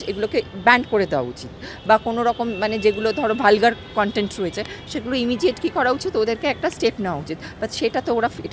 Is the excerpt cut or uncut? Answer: uncut